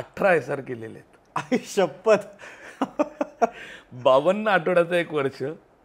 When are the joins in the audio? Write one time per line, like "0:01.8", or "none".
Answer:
none